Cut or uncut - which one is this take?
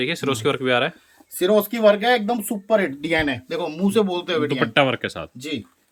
uncut